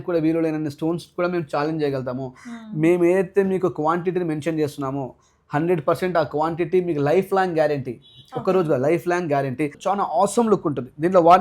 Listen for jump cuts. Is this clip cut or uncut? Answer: cut